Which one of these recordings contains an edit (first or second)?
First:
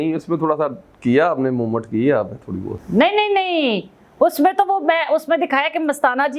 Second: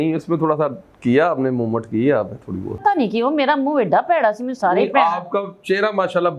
second